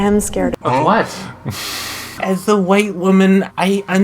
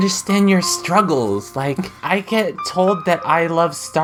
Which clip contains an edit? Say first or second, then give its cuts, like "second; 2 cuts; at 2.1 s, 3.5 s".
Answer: first; 1 cut; at 2.2 s